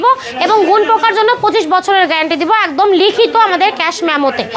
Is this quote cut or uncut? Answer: uncut